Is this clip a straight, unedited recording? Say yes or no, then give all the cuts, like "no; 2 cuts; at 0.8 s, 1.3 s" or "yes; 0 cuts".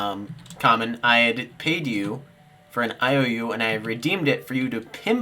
yes; 0 cuts